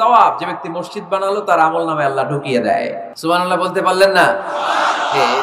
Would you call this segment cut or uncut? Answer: cut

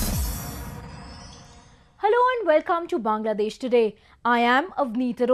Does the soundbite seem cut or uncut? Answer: uncut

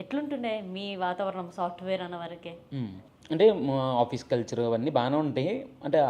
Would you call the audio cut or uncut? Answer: cut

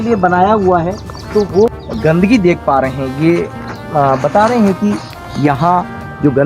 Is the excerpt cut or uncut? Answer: cut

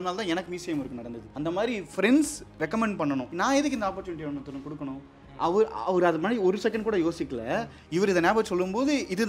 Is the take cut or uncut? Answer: cut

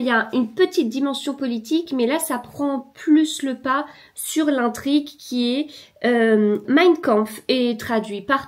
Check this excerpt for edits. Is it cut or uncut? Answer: uncut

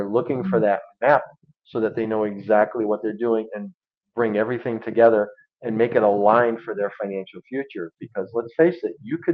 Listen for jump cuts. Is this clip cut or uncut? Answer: uncut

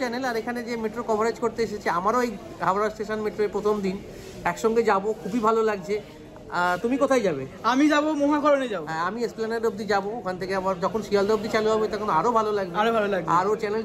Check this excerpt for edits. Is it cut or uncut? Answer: uncut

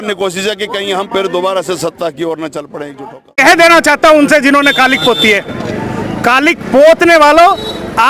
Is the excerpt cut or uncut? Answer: cut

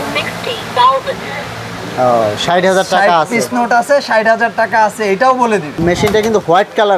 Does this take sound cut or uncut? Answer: cut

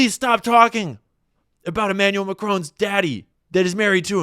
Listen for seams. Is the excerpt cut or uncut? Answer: cut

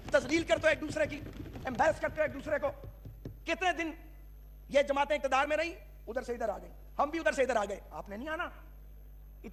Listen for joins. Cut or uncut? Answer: uncut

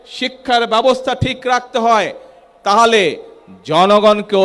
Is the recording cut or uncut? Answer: uncut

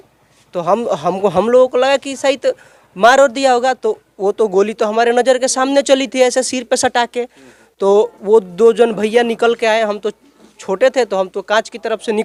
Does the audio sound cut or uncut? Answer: uncut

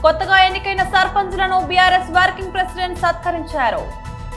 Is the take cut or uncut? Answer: uncut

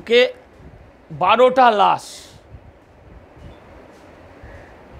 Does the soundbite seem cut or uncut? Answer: uncut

